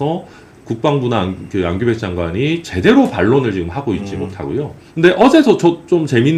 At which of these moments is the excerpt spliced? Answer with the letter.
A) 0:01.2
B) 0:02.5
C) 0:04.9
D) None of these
D